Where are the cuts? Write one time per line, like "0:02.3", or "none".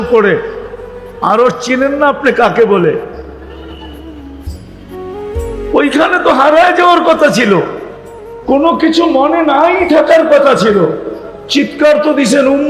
0:03.3
0:05.4